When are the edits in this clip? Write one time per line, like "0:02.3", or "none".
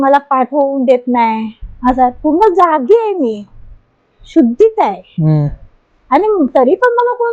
none